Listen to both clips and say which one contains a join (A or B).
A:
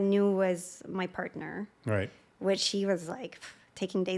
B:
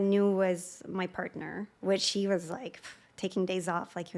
B